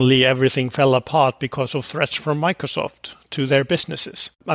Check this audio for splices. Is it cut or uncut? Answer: uncut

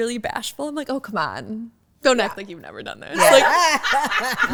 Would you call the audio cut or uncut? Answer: uncut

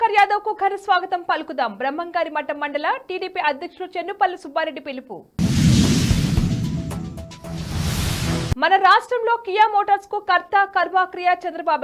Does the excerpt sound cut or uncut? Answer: uncut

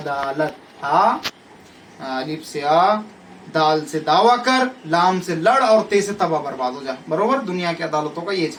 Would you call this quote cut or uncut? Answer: uncut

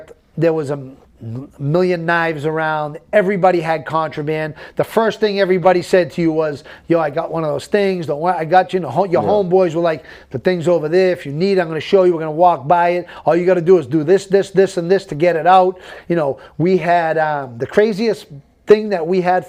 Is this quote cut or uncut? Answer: uncut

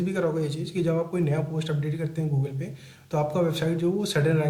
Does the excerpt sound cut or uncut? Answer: uncut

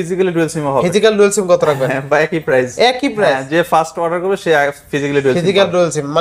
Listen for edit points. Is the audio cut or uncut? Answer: uncut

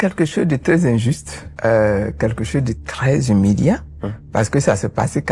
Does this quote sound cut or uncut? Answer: uncut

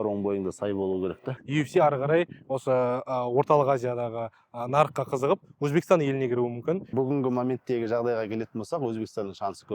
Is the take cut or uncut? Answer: cut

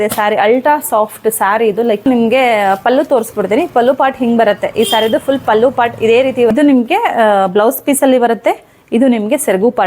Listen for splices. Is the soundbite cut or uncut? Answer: cut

